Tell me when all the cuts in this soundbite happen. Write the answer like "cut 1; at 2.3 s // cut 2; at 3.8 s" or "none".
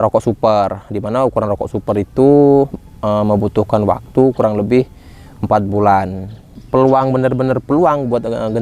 cut 1; at 6.3 s